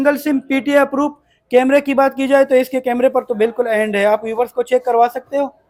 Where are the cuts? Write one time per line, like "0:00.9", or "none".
none